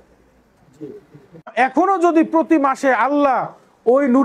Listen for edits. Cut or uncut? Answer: cut